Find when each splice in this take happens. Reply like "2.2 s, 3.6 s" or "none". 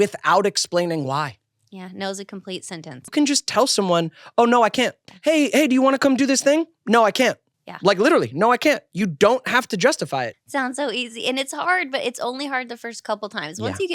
3.0 s, 10.4 s